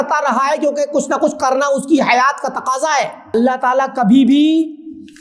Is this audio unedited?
no; 1 cut; at 3.3 s

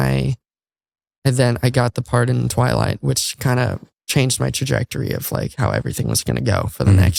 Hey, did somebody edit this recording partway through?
no; 0 cuts

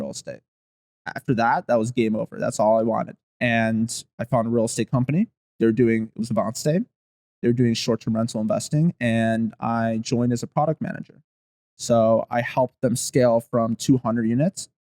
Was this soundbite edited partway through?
yes; 1 cut; at 3.2 s

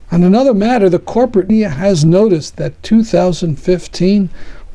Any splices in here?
yes; 1 cut; at 1.5 s

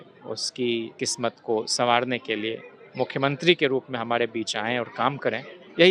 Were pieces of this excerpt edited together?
yes; 1 cut; at 0.9 s

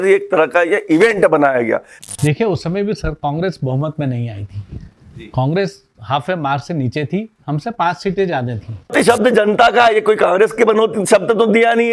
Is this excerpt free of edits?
no; 2 cuts; at 1.9 s, 8.9 s

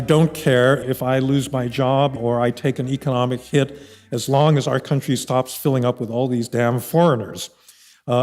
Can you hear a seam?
yes; 2 cuts; at 0.8 s, 2.2 s

